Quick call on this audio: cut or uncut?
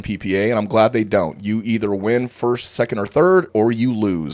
uncut